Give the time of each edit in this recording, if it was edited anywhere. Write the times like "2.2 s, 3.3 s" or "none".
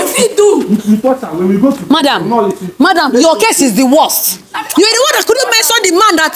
none